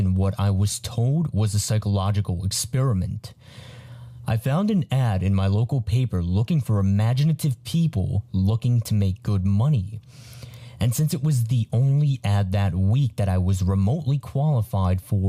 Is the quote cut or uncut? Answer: cut